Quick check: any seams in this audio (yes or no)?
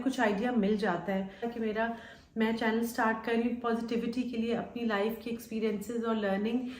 yes